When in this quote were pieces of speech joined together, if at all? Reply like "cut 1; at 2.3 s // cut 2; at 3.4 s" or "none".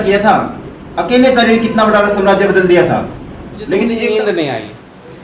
cut 1; at 3.9 s

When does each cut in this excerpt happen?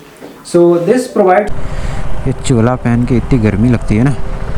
cut 1; at 1.5 s

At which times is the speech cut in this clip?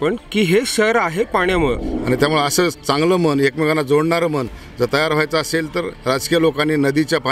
cut 1; at 1.9 s

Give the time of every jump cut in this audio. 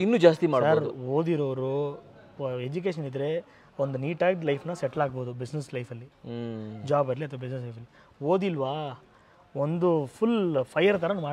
none

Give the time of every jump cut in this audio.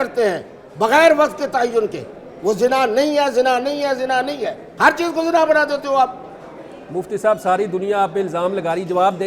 none

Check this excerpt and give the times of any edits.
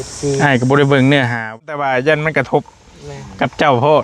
cut 1; at 1.4 s

